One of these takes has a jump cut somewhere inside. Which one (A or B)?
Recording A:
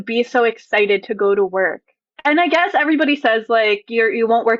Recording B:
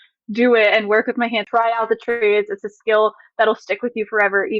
B